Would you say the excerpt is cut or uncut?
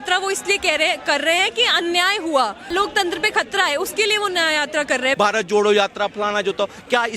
cut